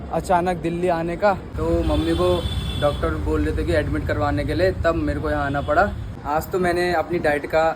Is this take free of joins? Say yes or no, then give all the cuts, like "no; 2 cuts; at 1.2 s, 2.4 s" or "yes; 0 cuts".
no; 2 cuts; at 1.5 s, 6.1 s